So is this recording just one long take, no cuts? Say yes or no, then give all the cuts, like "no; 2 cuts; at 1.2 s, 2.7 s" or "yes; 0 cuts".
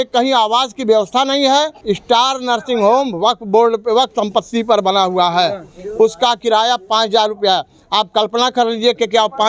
no; 1 cut; at 1.8 s